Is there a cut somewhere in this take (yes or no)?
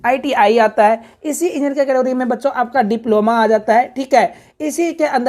no